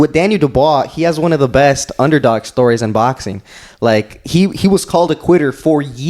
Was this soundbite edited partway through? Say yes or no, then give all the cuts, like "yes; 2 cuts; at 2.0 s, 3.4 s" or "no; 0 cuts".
no; 0 cuts